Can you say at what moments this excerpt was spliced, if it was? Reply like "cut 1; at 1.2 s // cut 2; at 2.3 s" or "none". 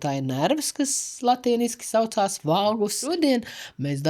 cut 1; at 3.1 s